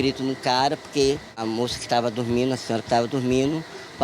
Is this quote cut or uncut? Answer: cut